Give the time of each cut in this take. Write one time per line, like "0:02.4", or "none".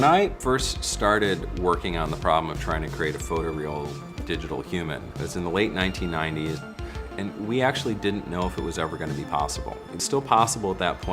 0:03.9